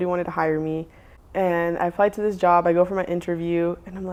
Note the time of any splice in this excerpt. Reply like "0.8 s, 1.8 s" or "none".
none